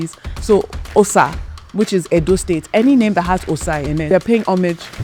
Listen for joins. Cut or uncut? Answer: cut